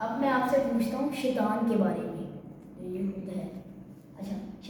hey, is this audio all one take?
yes; 0 cuts

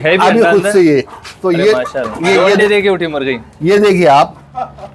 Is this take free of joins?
yes; 0 cuts

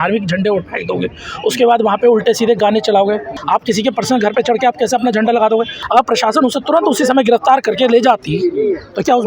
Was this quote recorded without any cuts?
no; 2 cuts; at 3.3 s, 5.8 s

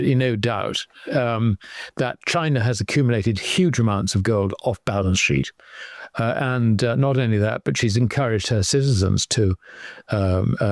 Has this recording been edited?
no; 0 cuts

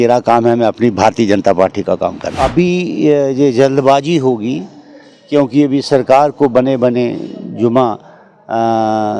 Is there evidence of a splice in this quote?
yes; 1 cut; at 2.3 s

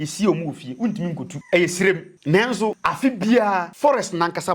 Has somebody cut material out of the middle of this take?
yes; 4 cuts; at 1.3 s, 2.1 s, 2.8 s, 3.7 s

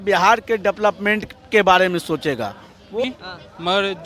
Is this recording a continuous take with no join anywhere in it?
no; 1 cut; at 3.0 s

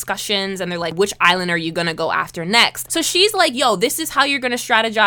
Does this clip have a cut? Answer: yes; 2 cuts; at 0.9 s, 2.8 s

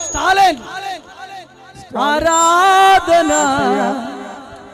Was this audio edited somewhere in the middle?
no; 0 cuts

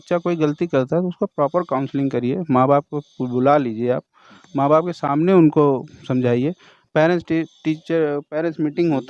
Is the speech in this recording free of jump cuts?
yes; 0 cuts

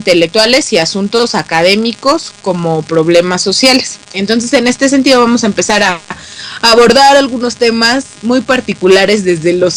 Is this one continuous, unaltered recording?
yes; 0 cuts

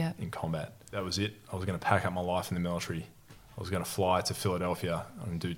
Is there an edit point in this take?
yes; 1 cut; at 1.0 s

